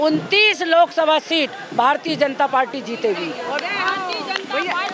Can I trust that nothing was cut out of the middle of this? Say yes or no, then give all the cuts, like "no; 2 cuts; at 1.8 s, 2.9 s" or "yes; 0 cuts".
yes; 0 cuts